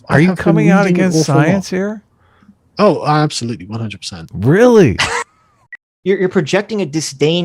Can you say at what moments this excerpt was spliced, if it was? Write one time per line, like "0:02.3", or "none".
0:05.8